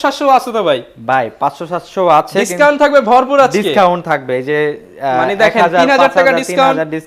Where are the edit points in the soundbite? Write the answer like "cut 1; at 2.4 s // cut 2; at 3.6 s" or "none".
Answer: none